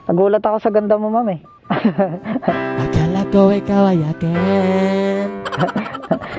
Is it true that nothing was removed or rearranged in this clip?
yes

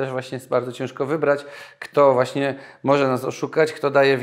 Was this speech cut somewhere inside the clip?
no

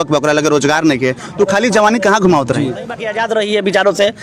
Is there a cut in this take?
yes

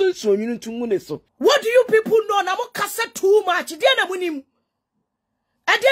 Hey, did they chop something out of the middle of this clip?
yes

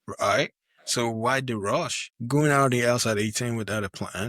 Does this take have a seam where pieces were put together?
yes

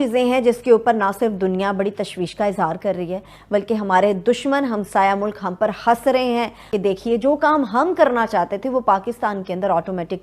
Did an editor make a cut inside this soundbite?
no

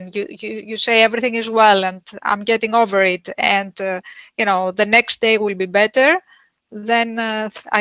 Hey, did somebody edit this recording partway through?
no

